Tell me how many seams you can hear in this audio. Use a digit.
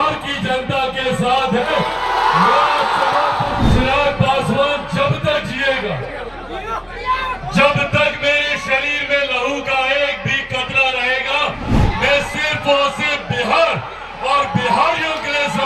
1